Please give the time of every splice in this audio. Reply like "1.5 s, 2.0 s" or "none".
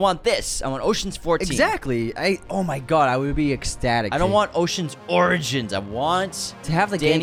none